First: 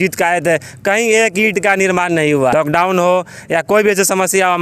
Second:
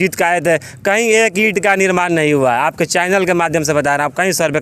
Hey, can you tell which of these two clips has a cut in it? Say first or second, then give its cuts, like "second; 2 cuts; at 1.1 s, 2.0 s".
first; 1 cut; at 2.5 s